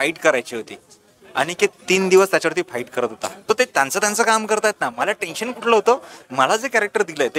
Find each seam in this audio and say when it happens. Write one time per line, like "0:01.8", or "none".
0:03.3